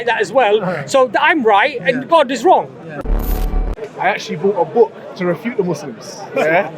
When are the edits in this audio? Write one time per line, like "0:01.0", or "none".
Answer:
0:03.4